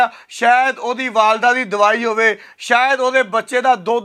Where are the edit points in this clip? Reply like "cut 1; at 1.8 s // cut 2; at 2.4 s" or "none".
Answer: none